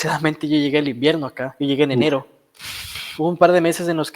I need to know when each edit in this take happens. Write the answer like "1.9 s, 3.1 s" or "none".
2.3 s